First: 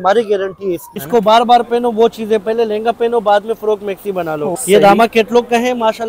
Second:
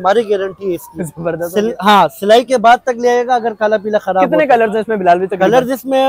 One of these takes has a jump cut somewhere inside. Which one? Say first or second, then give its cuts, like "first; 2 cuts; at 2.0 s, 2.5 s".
first; 2 cuts; at 0.9 s, 4.5 s